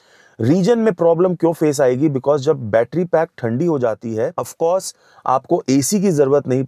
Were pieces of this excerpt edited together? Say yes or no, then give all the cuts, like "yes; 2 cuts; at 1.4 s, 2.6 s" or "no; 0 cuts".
yes; 1 cut; at 4.5 s